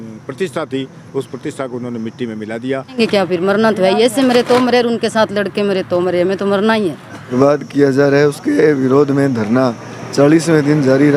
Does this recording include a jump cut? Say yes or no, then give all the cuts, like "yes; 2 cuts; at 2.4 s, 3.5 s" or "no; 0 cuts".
yes; 2 cuts; at 3.0 s, 7.3 s